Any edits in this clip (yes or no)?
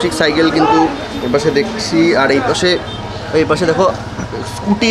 no